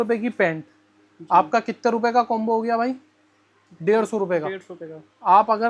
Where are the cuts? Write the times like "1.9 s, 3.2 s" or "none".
none